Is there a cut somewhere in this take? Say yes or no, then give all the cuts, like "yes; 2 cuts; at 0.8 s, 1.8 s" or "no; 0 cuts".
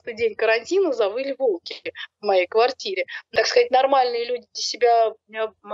yes; 1 cut; at 3.1 s